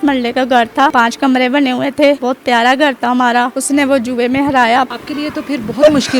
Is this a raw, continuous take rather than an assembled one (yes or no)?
no